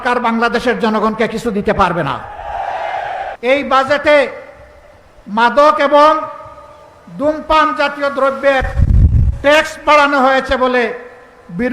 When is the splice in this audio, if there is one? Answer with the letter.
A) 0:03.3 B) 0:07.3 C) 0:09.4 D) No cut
A